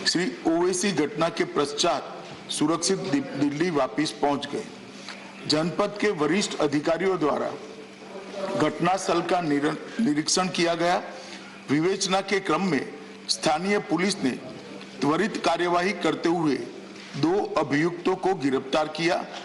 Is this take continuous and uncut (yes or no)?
yes